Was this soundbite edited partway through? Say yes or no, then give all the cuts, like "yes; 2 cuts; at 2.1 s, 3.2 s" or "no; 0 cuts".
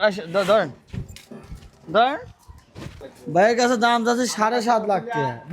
yes; 1 cut; at 3.1 s